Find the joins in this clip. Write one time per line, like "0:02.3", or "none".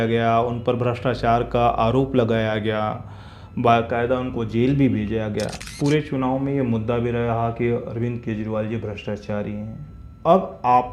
0:05.6